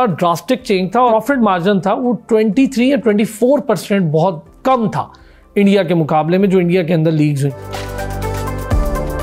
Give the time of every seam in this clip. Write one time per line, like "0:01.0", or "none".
0:01.1